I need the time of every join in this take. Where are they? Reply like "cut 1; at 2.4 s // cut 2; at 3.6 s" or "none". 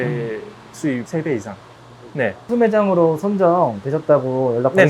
cut 1; at 2.4 s